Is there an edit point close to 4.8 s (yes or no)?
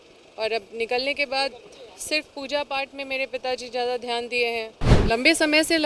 yes